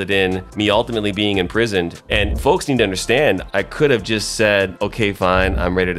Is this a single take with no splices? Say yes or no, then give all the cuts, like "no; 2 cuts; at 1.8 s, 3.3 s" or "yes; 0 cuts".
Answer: no; 3 cuts; at 1.9 s, 3.4 s, 4.8 s